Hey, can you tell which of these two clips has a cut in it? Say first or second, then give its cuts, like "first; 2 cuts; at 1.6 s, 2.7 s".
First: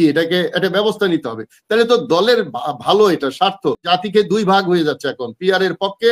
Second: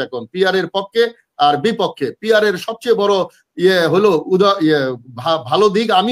first; 1 cut; at 3.8 s